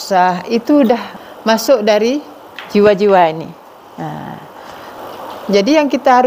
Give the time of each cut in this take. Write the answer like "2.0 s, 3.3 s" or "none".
1.1 s, 5.0 s